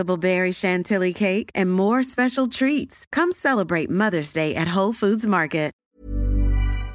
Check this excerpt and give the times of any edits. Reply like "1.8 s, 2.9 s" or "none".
5.8 s